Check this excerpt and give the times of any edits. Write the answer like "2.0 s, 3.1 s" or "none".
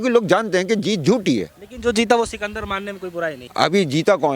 1.6 s, 3.4 s